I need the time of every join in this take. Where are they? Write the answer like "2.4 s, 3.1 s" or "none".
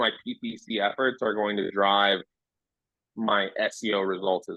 none